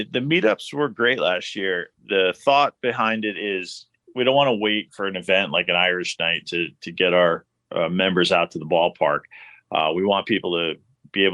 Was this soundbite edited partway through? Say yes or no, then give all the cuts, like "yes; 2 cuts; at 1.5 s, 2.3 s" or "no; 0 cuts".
yes; 2 cuts; at 1.9 s, 4.0 s